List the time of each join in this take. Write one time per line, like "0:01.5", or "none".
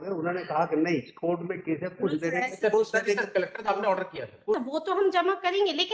0:04.6

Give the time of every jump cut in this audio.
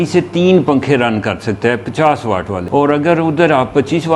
0:02.6

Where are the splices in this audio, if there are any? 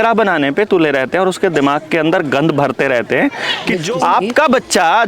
0:03.7

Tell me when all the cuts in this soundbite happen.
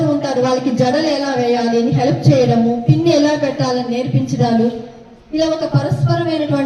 none

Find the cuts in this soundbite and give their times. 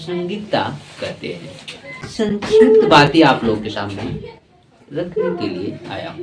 0:02.4

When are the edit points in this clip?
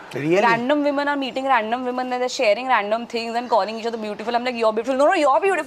none

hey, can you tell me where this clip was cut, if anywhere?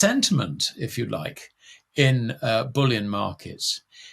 none

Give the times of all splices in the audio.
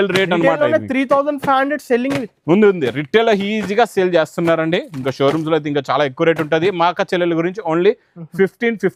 none

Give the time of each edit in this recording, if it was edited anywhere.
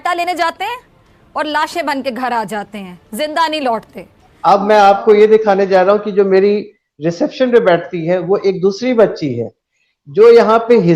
none

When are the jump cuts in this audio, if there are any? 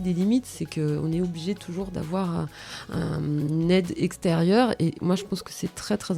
none

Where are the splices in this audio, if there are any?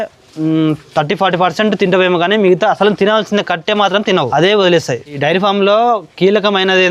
0:04.3
0:05.0

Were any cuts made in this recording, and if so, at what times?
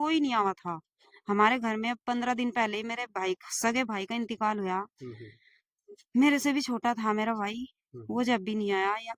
none

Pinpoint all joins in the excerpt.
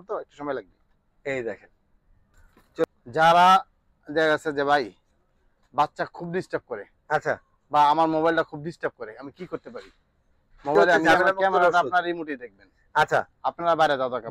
0:02.8
0:11.1

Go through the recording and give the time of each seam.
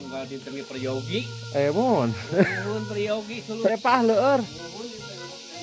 0:03.7

